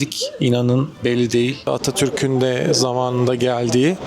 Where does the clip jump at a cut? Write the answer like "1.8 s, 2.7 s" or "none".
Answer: 1.6 s